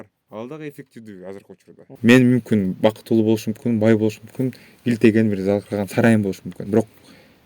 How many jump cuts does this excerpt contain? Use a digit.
2